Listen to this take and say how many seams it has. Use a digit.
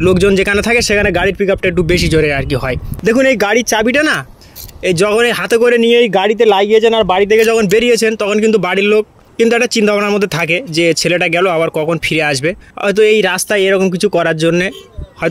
3